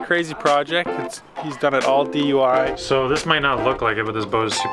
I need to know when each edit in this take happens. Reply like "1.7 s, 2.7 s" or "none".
2.8 s